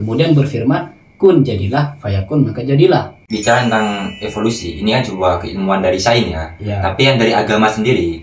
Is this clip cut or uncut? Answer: cut